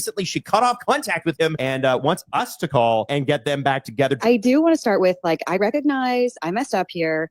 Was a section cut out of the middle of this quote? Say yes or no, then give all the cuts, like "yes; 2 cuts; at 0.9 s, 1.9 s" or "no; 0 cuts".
yes; 3 cuts; at 1.6 s, 3.1 s, 4.2 s